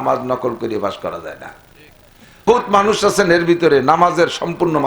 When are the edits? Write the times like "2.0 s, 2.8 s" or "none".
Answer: 2.5 s

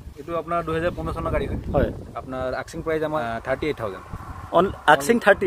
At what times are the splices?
3.2 s

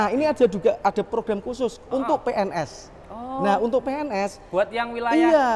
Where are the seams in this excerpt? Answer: none

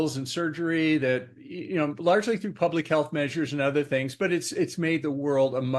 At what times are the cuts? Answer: none

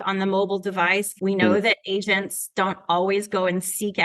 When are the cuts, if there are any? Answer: 1.1 s

